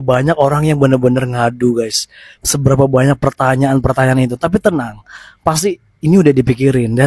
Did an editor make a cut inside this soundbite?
no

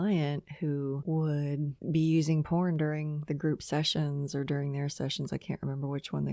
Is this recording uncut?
yes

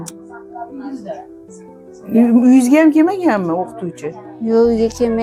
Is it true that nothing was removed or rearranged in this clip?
yes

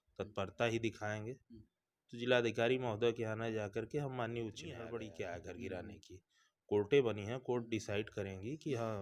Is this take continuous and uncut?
no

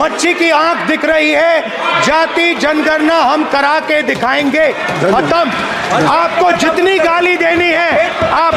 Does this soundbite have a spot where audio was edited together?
no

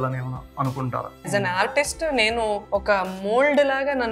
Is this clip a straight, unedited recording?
no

